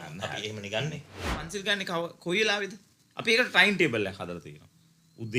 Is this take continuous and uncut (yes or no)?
no